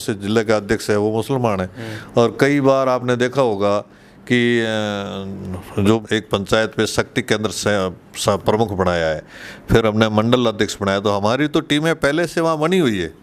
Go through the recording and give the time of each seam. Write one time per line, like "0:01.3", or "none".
0:06.0